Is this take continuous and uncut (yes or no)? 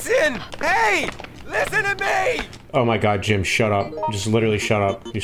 yes